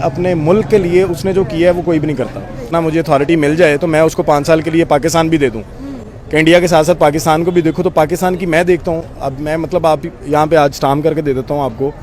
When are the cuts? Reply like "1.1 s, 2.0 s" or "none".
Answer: 2.7 s